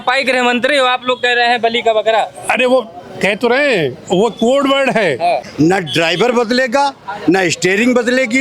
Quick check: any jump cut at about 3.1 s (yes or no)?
no